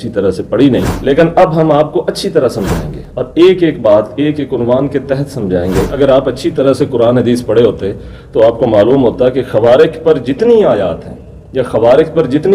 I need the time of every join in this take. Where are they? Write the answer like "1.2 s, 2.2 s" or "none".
5.9 s